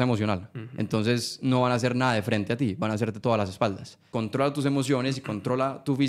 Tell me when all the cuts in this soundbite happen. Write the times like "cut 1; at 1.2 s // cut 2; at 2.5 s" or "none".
cut 1; at 4.1 s